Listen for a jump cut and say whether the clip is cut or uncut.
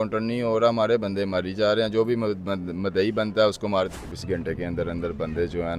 cut